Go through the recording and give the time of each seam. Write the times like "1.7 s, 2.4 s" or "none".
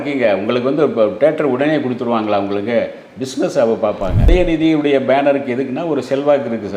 4.2 s